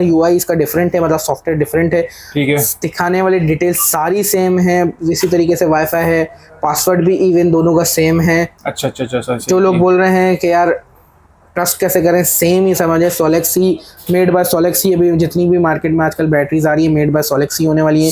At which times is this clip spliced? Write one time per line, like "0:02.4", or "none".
none

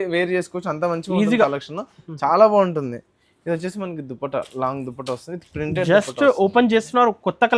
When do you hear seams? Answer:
none

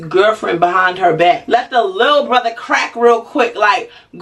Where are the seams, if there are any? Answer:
0:01.4

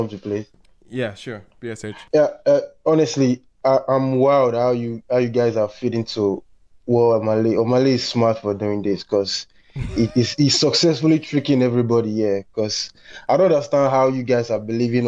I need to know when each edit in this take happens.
0:02.0

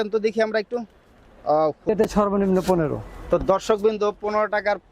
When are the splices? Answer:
0:01.9

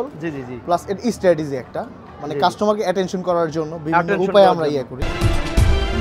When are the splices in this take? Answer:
0:05.1

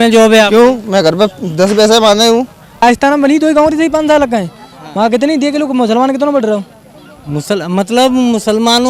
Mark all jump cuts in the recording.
0:02.8

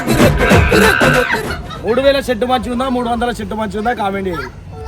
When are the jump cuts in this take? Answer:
0:01.4

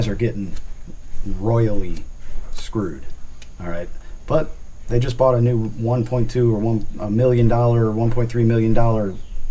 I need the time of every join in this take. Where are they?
none

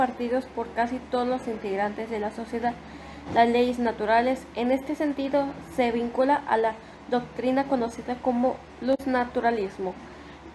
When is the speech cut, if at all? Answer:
0:09.1

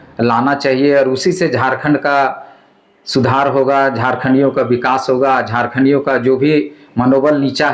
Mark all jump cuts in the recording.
none

